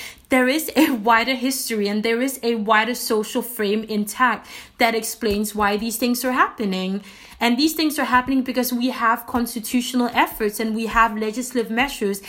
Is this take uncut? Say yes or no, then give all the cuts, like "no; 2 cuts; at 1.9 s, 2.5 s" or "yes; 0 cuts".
yes; 0 cuts